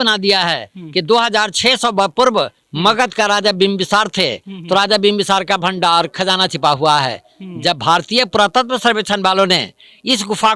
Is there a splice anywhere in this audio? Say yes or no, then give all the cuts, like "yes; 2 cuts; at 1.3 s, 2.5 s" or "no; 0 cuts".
no; 0 cuts